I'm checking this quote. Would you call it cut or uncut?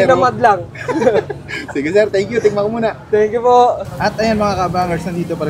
uncut